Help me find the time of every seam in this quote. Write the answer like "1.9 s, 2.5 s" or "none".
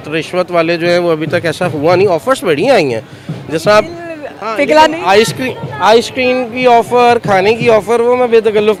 none